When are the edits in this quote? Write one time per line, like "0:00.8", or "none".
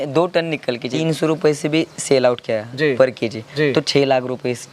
0:00.9